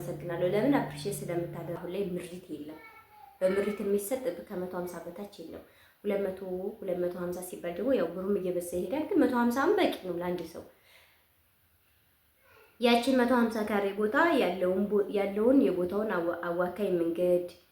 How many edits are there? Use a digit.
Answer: 1